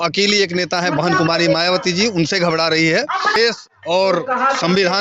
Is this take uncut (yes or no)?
no